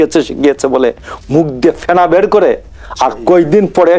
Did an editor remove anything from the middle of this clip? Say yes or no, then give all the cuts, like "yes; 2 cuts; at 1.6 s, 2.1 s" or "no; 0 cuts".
no; 0 cuts